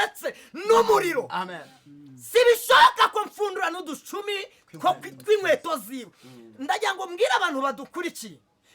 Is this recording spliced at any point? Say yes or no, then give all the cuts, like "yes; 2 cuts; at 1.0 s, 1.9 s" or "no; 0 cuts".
no; 0 cuts